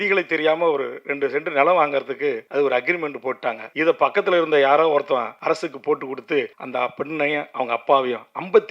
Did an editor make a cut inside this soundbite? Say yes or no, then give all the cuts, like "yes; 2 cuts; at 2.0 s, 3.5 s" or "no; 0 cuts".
yes; 4 cuts; at 2.4 s, 3.6 s, 5.3 s, 6.6 s